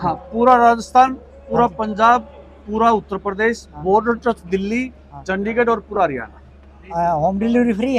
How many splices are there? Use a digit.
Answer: 1